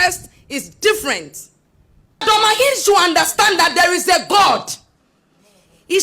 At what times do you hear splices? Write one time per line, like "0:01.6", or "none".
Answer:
0:02.2

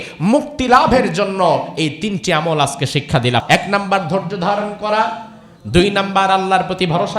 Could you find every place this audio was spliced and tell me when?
0:03.4

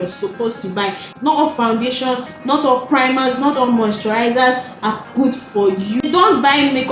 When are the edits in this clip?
0:01.0
0:06.0

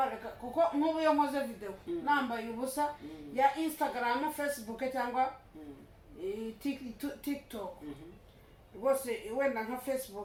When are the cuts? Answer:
none

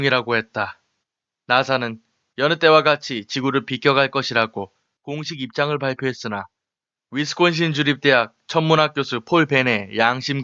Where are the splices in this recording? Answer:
none

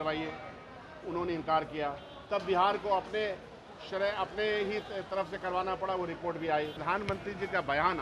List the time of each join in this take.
0:06.8

